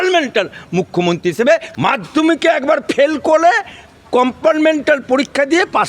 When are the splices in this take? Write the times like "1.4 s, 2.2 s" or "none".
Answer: 1.7 s